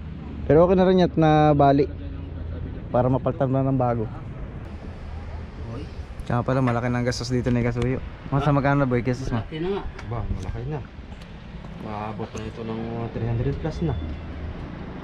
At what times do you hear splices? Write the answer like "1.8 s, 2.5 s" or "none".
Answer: 4.6 s